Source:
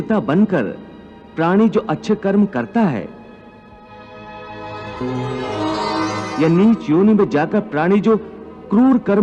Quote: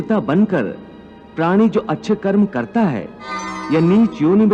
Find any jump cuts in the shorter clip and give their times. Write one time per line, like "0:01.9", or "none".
0:03.5